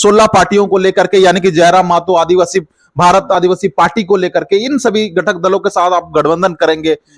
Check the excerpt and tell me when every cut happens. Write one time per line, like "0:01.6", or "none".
none